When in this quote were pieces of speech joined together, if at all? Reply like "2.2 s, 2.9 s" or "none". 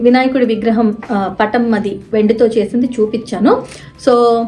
none

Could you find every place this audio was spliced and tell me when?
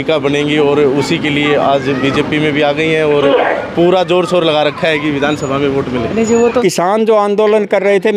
6.6 s

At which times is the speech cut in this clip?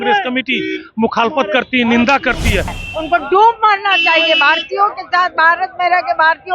2.8 s

